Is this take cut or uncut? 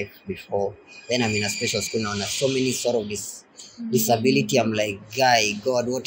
uncut